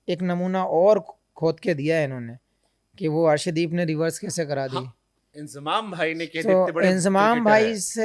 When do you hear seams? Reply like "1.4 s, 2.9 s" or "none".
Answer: none

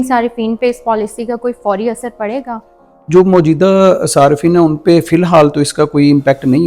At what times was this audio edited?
none

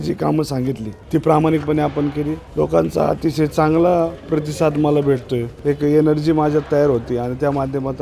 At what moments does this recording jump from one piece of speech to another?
0.9 s, 2.4 s, 4.2 s, 5.5 s

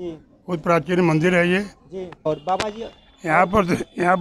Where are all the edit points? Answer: 2.2 s

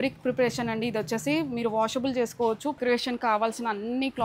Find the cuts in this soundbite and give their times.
2.8 s

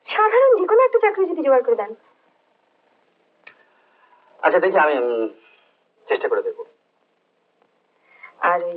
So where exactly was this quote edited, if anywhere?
none

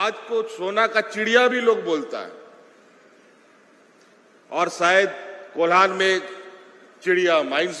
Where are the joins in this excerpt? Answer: none

